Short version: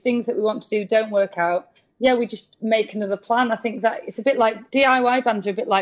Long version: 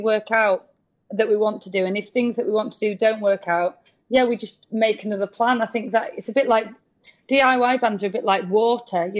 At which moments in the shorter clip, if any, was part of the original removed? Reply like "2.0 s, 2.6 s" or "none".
4.6 s